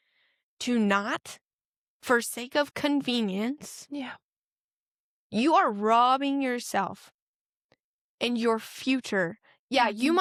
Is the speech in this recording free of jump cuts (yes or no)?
yes